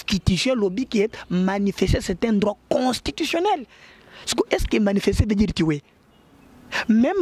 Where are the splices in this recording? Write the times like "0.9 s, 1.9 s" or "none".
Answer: none